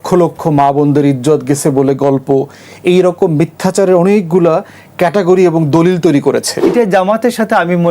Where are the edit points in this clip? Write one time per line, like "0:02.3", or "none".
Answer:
0:06.7